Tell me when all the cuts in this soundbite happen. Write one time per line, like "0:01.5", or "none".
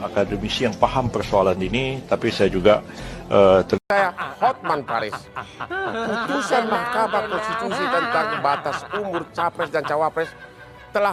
0:03.8